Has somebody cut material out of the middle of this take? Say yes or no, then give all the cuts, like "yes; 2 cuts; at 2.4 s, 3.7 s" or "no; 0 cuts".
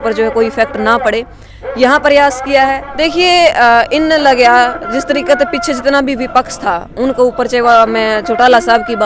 yes; 1 cut; at 2.9 s